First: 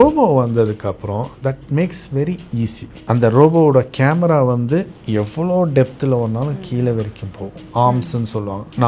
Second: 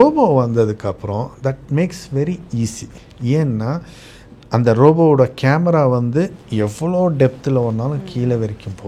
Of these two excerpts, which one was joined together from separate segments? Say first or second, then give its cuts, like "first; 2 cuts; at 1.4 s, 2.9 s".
first; 2 cuts; at 2.9 s, 7.6 s